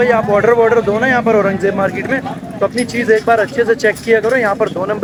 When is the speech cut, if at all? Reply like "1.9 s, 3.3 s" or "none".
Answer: none